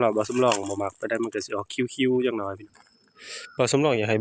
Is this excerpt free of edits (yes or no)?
no